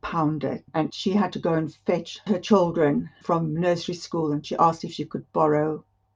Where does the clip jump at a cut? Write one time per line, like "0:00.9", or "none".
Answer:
0:00.9
0:04.4